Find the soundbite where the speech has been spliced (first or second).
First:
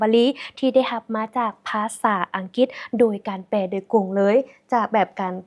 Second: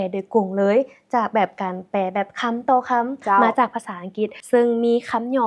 second